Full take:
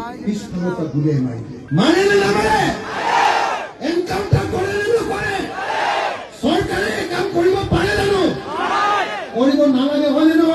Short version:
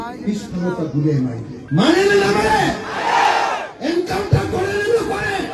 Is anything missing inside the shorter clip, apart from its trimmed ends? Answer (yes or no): no